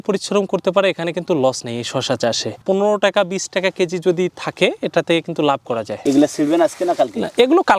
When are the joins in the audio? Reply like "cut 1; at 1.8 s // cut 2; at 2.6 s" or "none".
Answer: none